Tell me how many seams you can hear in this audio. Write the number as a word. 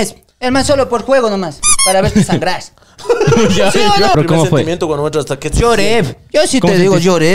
one